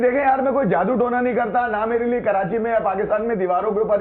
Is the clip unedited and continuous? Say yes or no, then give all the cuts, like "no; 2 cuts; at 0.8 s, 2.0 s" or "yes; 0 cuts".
yes; 0 cuts